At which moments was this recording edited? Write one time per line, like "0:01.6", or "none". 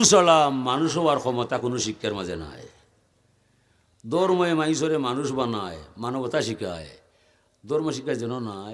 none